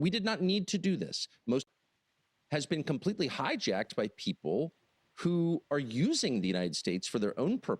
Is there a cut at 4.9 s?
no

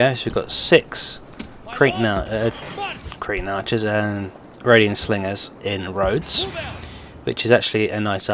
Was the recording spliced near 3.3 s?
yes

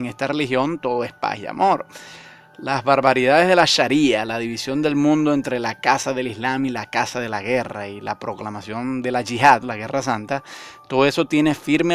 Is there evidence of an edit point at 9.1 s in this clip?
no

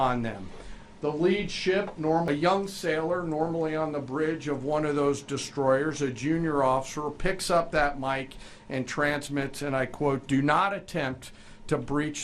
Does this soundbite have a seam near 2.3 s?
yes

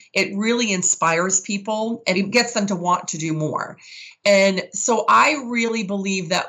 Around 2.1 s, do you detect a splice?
yes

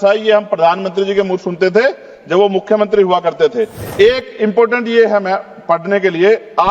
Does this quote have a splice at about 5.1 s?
no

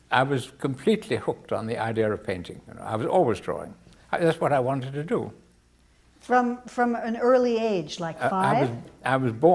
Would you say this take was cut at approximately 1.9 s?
yes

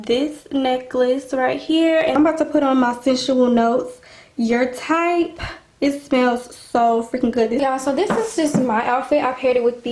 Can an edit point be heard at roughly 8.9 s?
no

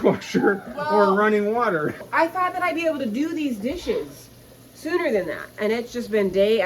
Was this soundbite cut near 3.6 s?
no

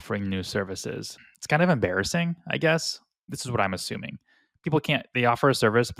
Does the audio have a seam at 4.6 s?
no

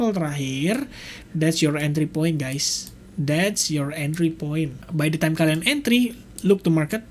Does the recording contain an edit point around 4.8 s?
yes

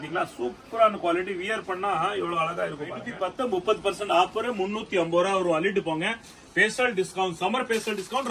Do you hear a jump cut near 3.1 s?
yes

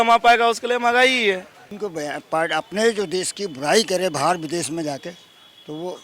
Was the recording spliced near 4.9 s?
no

